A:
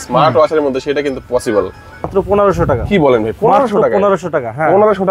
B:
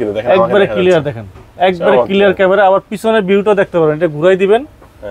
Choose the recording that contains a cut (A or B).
A